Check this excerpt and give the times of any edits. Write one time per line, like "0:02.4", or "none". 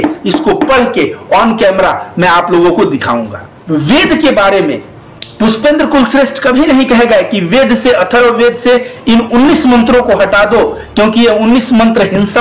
0:03.5